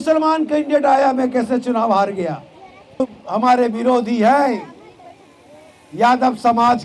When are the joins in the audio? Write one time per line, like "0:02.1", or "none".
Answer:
0:03.0

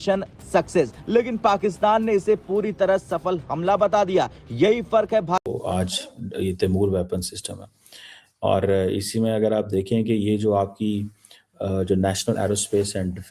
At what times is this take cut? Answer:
0:05.4

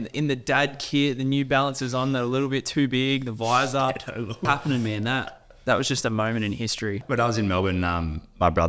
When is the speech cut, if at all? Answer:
0:04.4
0:07.0

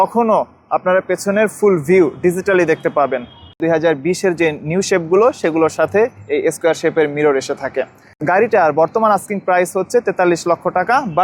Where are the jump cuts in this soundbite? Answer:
0:03.6
0:08.0

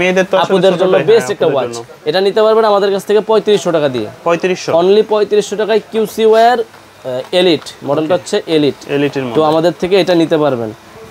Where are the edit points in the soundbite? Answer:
none

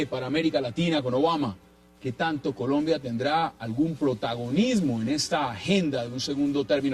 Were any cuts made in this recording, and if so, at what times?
0:01.0

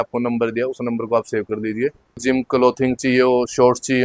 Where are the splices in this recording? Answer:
0:02.2

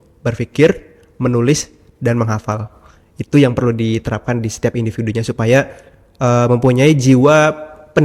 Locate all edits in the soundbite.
none

